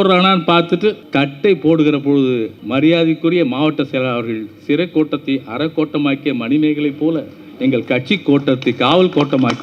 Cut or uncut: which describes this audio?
cut